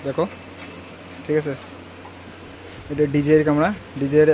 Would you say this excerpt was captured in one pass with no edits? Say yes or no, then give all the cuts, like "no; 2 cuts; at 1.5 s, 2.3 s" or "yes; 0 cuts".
yes; 0 cuts